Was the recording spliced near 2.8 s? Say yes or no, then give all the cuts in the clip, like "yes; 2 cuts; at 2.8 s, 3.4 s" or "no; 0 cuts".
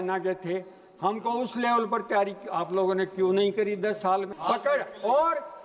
no; 1 cut; at 4.3 s